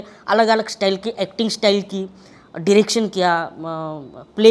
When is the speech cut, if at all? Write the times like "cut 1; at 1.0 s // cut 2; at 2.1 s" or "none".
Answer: none

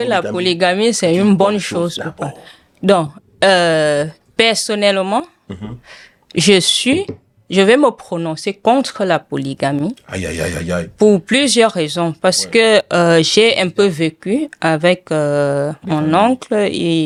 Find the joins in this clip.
none

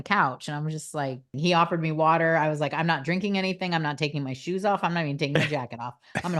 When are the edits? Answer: cut 1; at 1.3 s

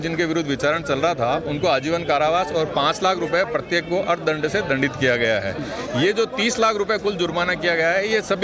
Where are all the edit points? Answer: cut 1; at 3.0 s

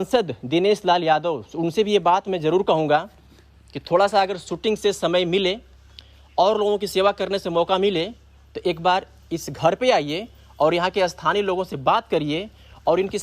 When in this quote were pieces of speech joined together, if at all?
none

